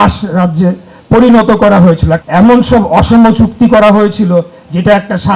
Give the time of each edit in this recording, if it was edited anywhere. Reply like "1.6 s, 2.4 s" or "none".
2.1 s